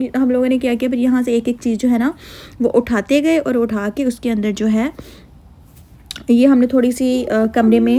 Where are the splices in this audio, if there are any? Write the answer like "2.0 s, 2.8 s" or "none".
none